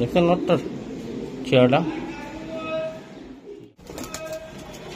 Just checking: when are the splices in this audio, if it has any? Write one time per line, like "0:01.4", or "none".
0:03.4